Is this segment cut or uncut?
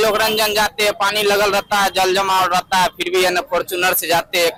uncut